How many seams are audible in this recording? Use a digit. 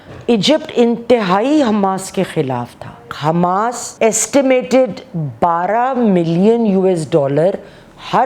2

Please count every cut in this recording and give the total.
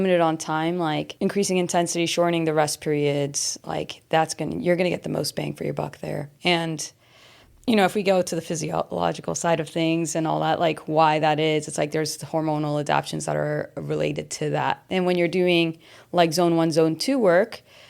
3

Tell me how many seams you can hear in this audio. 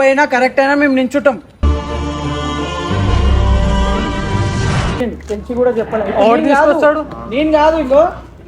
1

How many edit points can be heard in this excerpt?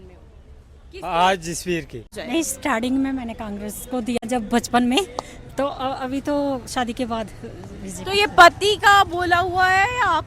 2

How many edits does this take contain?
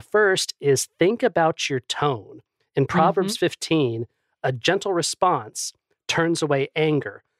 1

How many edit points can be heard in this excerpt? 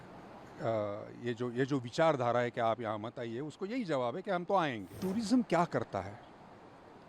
1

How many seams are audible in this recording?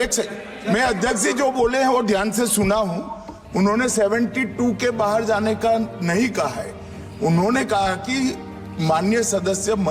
0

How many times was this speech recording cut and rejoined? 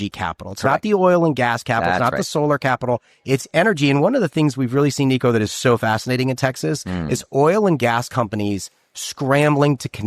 0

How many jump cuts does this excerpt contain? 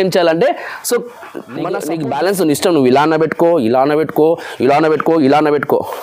1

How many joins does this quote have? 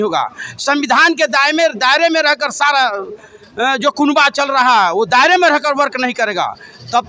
0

